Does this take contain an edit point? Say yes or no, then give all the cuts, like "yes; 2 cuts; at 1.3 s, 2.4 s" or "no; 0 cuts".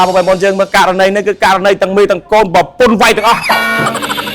yes; 1 cut; at 3.4 s